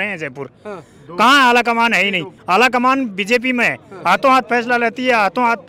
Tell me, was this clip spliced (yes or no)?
yes